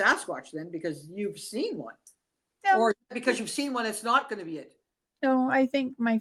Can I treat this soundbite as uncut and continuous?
yes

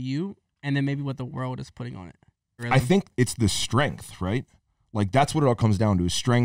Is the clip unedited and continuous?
no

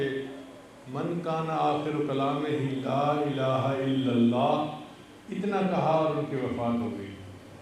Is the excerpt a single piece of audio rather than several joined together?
yes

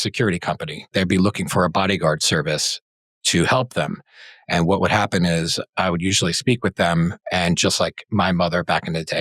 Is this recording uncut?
yes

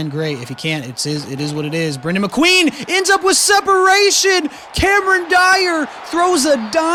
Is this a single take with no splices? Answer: yes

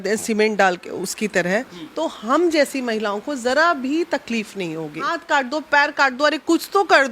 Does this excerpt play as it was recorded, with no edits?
no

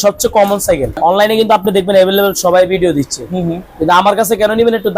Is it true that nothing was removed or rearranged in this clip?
no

